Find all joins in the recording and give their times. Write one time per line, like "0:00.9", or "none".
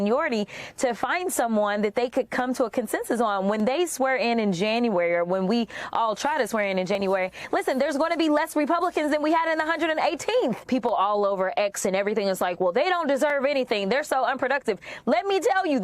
0:10.6